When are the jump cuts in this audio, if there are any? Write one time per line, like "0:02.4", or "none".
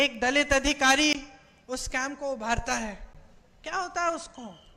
none